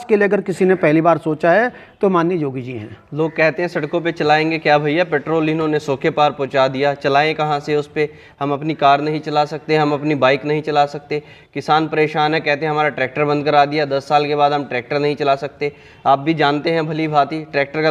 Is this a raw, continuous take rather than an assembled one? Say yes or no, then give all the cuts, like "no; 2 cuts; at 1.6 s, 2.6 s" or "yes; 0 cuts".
yes; 0 cuts